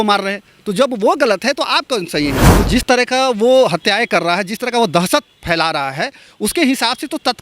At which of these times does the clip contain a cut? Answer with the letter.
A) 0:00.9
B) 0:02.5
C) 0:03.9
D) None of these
B